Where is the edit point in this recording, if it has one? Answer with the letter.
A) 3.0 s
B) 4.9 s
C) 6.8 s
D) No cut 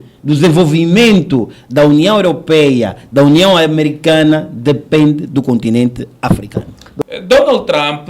C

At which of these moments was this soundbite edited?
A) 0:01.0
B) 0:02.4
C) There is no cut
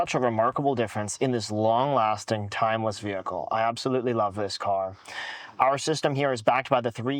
C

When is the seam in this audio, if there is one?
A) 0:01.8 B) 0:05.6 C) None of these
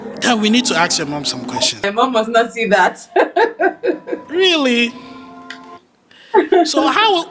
A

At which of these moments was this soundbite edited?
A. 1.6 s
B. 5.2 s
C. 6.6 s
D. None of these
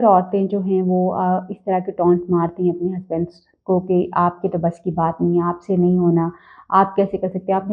D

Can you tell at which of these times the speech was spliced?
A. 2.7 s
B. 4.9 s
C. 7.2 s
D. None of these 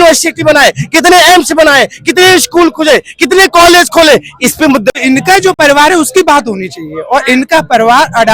B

